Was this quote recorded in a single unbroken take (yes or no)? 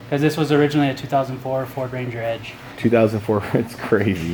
yes